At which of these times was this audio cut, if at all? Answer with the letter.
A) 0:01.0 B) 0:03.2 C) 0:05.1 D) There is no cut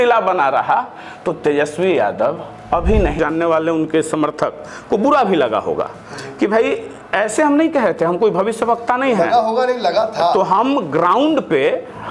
B